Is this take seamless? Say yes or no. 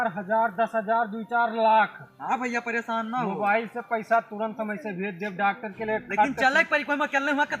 yes